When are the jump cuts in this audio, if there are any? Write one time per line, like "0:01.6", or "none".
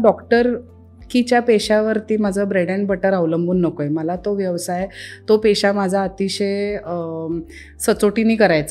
none

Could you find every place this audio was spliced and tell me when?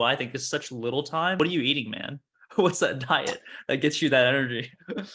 0:01.4

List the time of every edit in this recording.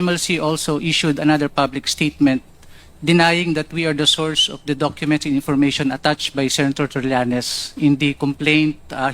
0:08.2

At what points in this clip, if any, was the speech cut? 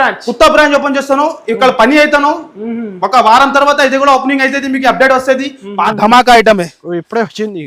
0:05.7

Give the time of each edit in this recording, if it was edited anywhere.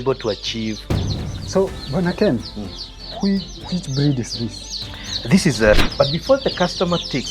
0:01.2
0:05.8

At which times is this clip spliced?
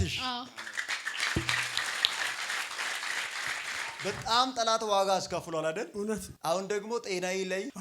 0:04.0
0:06.3

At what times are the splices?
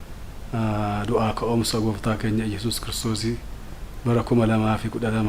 none

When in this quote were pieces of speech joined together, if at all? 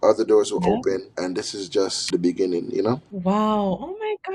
0:01.5
0:03.1

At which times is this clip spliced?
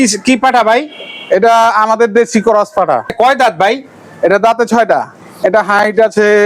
0:03.1
0:05.3

